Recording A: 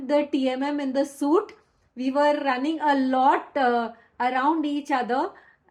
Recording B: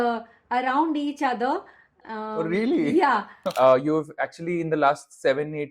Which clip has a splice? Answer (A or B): B